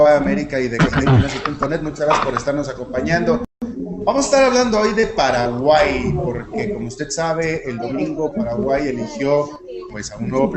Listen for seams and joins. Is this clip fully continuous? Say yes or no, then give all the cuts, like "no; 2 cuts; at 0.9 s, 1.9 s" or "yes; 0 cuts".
yes; 0 cuts